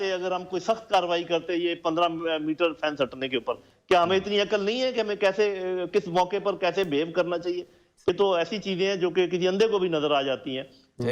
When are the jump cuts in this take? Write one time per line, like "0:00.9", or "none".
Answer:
0:08.1